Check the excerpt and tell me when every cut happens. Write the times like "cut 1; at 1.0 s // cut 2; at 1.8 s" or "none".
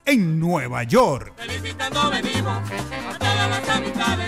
cut 1; at 1.3 s